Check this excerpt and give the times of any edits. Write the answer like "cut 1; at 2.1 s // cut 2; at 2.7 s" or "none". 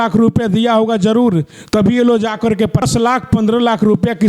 cut 1; at 2.8 s

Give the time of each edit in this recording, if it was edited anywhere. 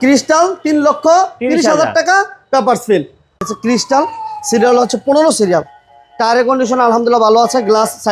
cut 1; at 3.3 s

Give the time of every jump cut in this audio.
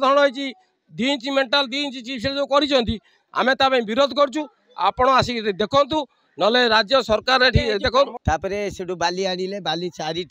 cut 1; at 8.2 s

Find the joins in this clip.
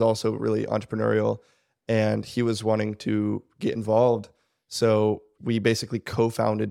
cut 1; at 5.3 s

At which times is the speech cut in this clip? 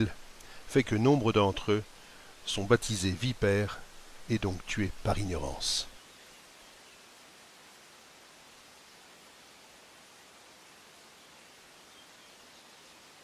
cut 1; at 2.4 s

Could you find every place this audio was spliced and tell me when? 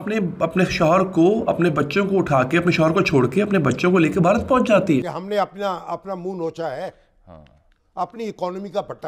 cut 1; at 5.2 s

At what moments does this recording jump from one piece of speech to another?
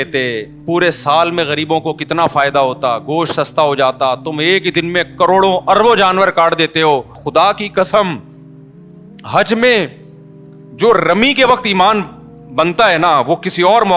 cut 1; at 7.2 s

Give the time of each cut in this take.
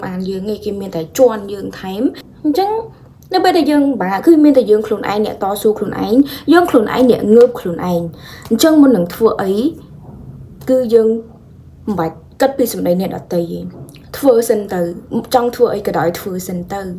cut 1; at 2.3 s

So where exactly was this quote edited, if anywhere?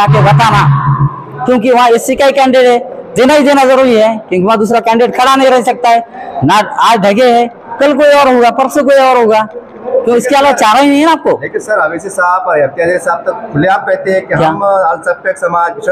none

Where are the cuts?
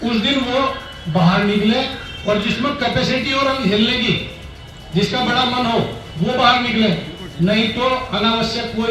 none

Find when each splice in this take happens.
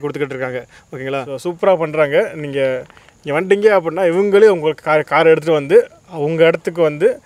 cut 1; at 1.3 s

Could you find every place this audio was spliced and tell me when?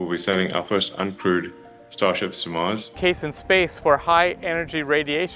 cut 1; at 3.0 s

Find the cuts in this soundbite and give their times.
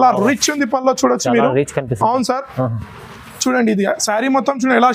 none

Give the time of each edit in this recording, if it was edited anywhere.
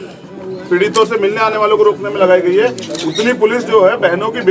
none

